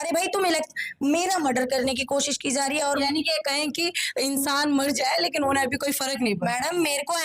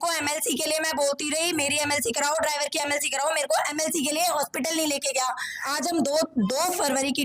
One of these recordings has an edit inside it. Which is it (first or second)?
second